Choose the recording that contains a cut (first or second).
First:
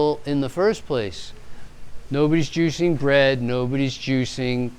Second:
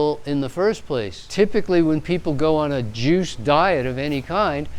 second